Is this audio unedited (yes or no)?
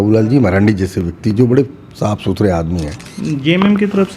no